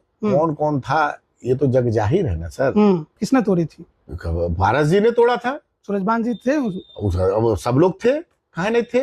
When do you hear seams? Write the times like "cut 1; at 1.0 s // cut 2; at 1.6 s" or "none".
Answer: cut 1; at 3.1 s